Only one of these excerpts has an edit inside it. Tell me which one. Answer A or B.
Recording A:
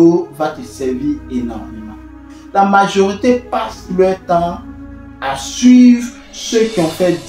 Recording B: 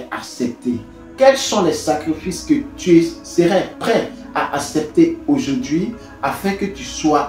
A